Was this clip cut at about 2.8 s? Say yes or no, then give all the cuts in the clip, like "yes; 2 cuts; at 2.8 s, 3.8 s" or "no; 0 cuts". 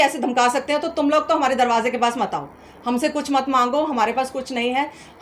no; 0 cuts